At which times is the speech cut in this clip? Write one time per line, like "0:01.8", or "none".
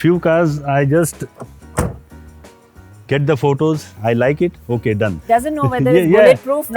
0:03.9
0:05.1